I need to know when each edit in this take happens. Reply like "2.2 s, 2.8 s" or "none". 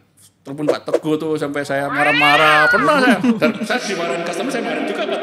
none